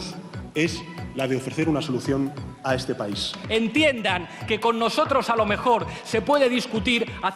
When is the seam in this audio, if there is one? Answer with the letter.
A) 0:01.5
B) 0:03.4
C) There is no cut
B